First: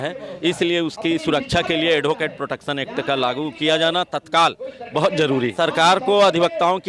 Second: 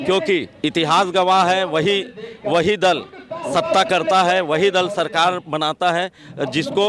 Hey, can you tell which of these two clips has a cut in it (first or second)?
first